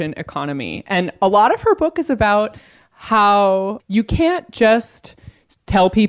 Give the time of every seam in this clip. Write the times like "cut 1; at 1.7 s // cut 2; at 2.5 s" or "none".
cut 1; at 3.8 s